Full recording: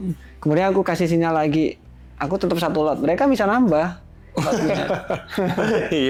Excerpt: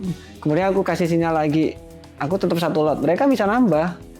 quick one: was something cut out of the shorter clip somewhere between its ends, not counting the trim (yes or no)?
no